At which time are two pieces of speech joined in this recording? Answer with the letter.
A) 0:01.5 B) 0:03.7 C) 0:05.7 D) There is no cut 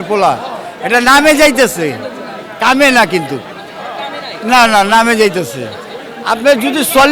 D